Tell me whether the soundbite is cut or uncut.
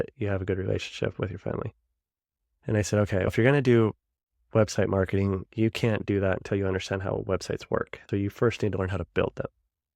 cut